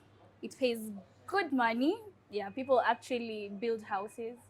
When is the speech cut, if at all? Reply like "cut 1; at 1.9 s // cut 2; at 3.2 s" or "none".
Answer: none